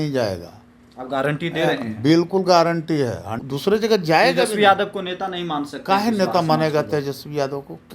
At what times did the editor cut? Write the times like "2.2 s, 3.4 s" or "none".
3.3 s